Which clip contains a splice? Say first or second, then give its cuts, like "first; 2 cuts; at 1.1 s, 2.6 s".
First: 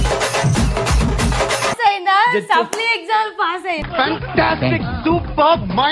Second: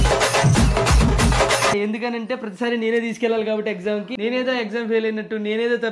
first; 1 cut; at 1.8 s